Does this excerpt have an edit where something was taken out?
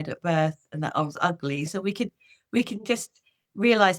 yes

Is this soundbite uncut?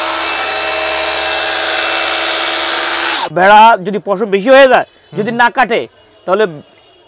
no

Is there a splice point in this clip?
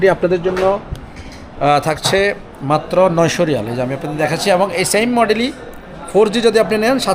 no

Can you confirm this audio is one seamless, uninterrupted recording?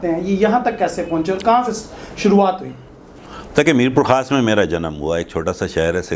yes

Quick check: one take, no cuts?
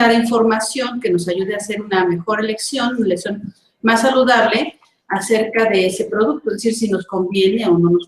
no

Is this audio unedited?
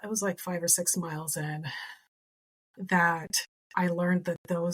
yes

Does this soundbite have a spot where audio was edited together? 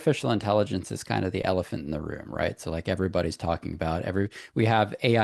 no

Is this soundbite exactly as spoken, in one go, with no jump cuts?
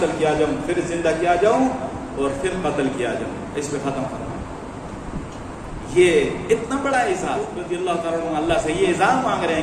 no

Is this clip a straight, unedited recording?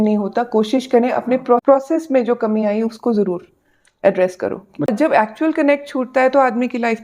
no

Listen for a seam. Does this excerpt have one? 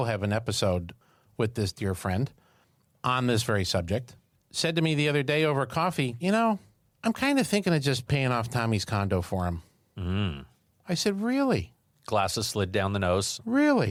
no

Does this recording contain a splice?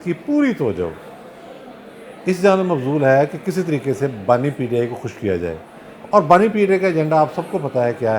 no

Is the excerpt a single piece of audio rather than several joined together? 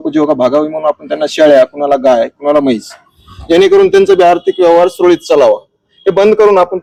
yes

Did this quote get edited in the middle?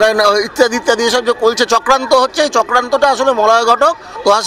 no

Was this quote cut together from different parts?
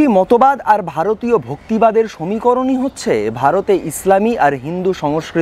no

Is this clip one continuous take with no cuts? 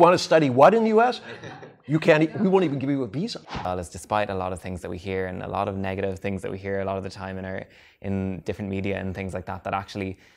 no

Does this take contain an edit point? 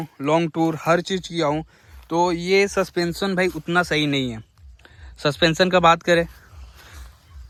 no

